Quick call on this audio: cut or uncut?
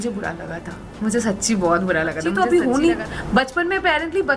cut